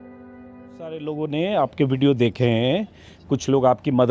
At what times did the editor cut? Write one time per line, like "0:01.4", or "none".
0:01.1